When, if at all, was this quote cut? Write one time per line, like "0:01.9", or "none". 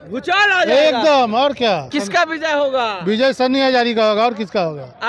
0:01.9